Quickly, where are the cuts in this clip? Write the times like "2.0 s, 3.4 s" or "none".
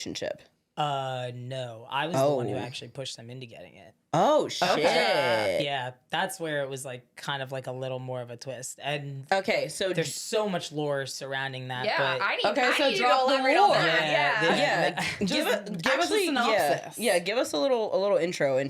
none